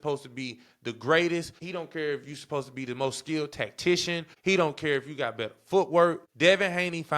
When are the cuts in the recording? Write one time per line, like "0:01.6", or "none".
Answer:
0:01.6
0:04.3
0:06.3